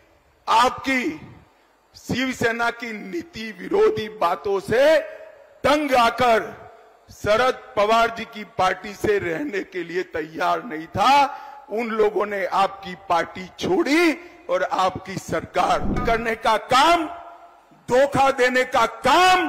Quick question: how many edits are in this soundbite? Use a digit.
1